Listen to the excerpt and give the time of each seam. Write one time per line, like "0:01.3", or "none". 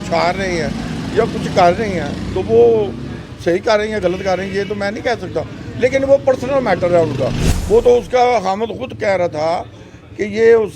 0:07.5